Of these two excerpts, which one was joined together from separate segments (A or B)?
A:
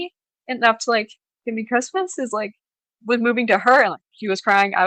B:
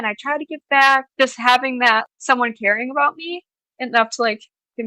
B